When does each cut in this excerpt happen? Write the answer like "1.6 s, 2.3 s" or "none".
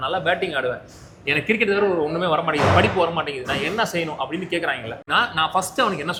none

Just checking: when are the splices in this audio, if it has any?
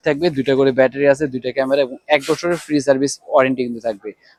none

